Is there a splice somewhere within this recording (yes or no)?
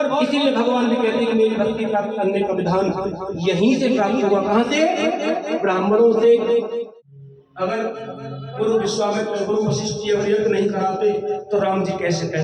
yes